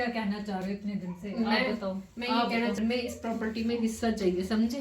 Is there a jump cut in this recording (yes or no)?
yes